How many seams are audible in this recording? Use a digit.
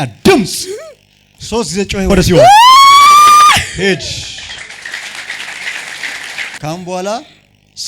2